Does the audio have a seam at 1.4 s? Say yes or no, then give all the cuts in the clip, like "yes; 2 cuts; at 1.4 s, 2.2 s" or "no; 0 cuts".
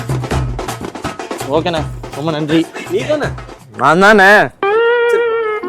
yes; 2 cuts; at 1.4 s, 4.5 s